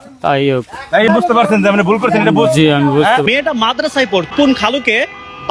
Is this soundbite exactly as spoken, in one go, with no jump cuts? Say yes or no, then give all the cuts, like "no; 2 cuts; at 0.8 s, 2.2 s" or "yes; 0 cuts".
no; 3 cuts; at 1.1 s, 3.2 s, 4.3 s